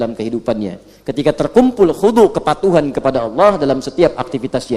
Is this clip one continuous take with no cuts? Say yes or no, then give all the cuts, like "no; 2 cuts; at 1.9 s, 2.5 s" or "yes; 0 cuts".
yes; 0 cuts